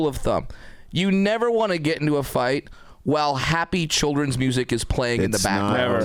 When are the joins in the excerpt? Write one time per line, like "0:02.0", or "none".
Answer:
none